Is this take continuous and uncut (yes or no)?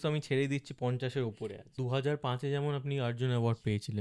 no